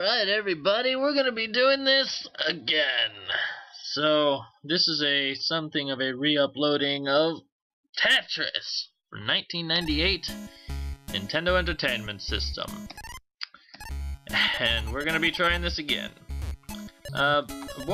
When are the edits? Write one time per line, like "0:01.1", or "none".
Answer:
none